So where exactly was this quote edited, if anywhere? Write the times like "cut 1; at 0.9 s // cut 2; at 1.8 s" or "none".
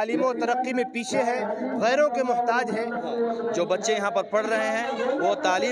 cut 1; at 3.0 s